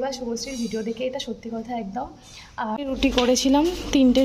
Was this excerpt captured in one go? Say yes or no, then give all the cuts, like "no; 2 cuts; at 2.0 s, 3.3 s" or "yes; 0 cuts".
no; 1 cut; at 2.8 s